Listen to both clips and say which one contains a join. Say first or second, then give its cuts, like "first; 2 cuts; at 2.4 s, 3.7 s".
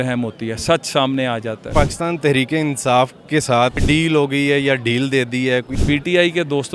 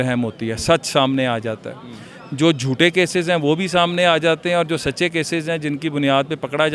first; 3 cuts; at 1.7 s, 3.8 s, 5.8 s